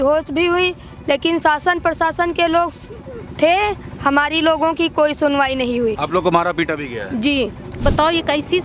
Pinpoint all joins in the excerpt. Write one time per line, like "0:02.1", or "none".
0:07.7